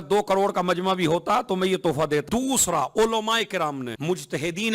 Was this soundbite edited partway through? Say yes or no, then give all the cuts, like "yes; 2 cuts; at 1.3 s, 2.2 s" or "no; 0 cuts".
yes; 2 cuts; at 2.3 s, 3.9 s